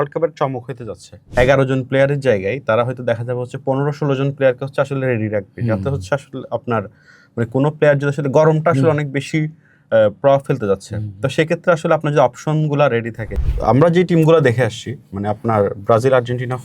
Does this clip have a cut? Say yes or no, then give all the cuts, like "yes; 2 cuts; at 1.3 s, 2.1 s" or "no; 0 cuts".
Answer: yes; 2 cuts; at 1.2 s, 13.2 s